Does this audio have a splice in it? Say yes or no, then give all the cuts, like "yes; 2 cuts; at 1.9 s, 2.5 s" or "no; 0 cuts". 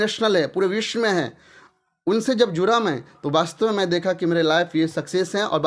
no; 0 cuts